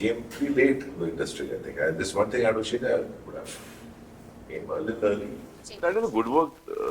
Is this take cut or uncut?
cut